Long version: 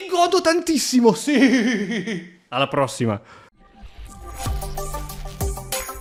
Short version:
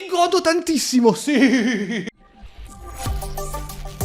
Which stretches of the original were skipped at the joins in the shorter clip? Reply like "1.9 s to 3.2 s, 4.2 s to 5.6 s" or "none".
2.1 s to 3.5 s